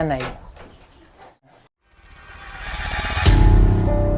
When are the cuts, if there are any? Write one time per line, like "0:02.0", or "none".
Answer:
0:01.6

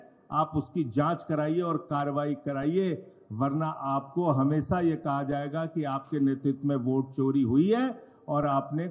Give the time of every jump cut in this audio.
none

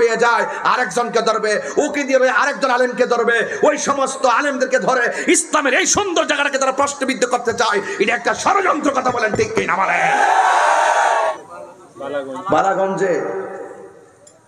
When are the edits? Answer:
0:11.4

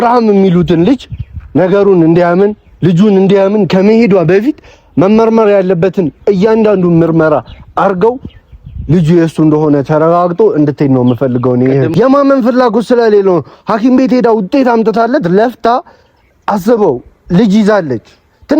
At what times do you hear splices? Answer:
0:11.9

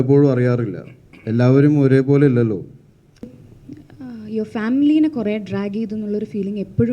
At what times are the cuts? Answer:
0:03.4

